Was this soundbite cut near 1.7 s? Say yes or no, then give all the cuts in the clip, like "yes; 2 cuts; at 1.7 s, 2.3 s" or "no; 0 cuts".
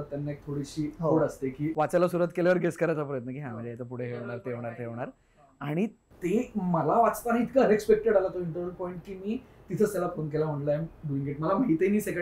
yes; 1 cut; at 1.7 s